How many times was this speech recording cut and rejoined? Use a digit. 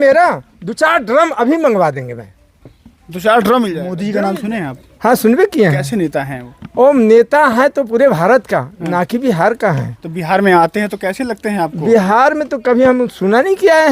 1